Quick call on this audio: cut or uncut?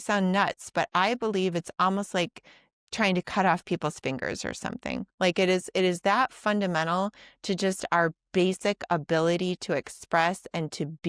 uncut